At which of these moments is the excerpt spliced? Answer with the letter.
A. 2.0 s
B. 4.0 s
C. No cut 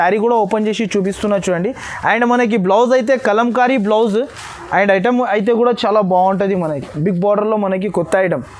C